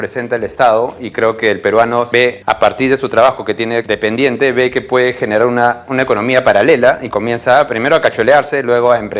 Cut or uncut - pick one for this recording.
cut